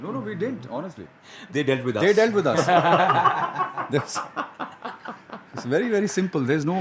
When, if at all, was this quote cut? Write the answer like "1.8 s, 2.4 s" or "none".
none